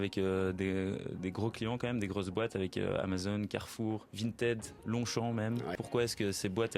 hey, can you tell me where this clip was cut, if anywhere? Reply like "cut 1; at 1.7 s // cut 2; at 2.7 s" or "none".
cut 1; at 4.1 s // cut 2; at 5.8 s